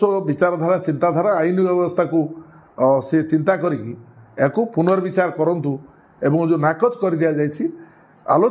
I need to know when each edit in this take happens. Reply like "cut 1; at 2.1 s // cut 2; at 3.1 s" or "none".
none